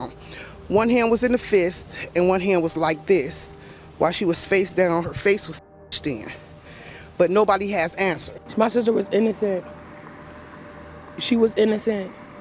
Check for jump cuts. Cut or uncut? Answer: cut